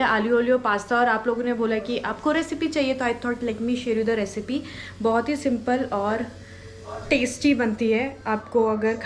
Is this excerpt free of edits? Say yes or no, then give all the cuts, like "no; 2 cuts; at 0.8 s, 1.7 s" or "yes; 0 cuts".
yes; 0 cuts